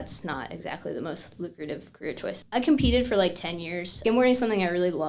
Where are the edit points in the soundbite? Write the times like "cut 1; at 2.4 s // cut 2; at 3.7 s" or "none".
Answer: cut 1; at 2.4 s // cut 2; at 3.9 s